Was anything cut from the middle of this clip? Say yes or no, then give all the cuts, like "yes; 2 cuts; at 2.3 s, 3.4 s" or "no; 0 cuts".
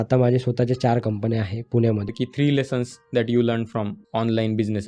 yes; 2 cuts; at 2.1 s, 4.0 s